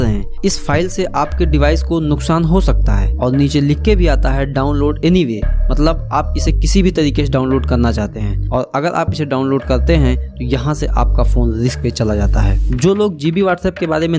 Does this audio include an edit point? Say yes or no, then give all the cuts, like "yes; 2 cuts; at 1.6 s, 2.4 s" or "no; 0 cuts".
no; 0 cuts